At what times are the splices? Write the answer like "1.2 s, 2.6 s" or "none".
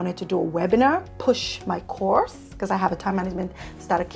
1.1 s